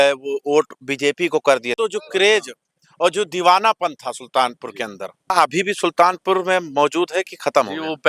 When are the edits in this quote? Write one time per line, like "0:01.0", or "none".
0:01.7
0:05.3